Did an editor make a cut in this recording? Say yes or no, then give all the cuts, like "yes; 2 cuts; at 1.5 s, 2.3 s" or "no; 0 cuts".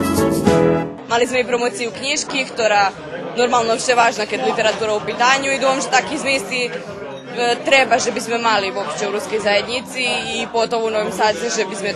yes; 1 cut; at 1.0 s